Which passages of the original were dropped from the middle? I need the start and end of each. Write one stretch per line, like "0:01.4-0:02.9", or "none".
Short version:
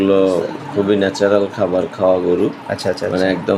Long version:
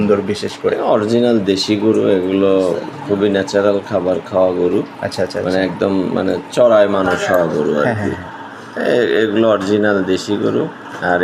none

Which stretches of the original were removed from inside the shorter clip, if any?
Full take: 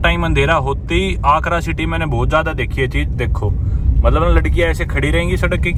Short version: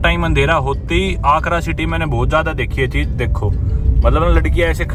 none

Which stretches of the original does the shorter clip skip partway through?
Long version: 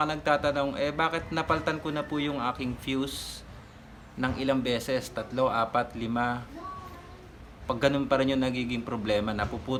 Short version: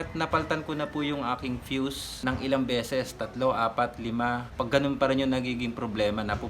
0:03.2-0:04.0
0:06.4-0:07.6

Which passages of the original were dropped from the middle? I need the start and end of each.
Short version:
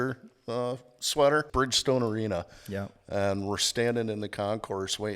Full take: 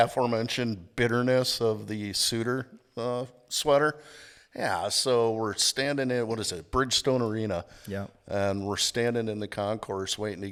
0:04.0-0:06.7

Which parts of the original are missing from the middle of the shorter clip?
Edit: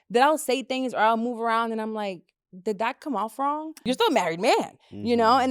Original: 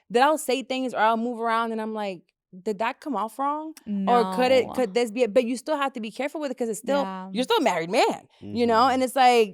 0:03.7-0:07.2

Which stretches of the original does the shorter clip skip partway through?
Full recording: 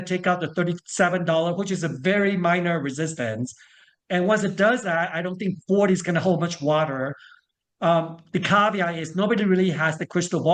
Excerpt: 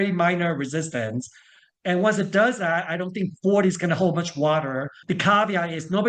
0:07.2-0:08.2

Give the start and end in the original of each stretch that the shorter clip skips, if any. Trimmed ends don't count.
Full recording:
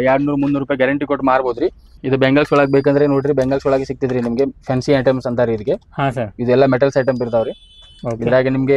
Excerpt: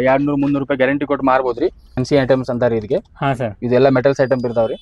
0:01.9-0:04.6

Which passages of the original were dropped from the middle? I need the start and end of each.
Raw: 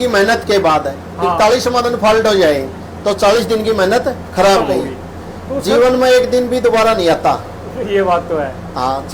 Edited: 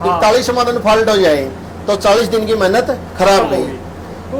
none

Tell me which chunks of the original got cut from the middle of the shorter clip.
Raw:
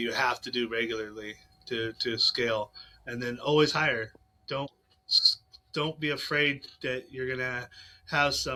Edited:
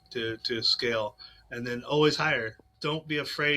0:04.2-0:05.6

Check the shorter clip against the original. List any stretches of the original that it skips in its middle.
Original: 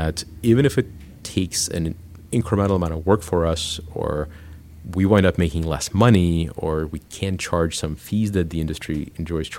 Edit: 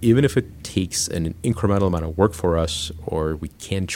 0:01.3-0:01.8
0:03.9-0:06.5

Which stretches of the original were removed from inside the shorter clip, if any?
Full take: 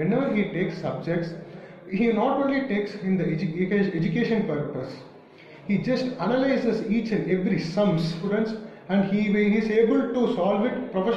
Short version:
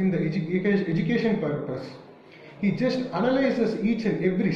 none

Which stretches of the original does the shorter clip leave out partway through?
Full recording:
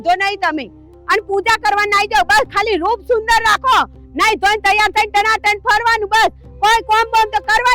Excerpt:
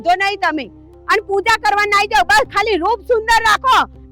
none

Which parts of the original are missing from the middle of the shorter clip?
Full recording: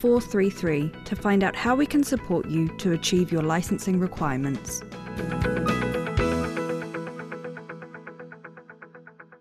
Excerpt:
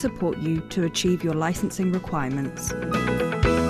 0:04.8-0:05.4

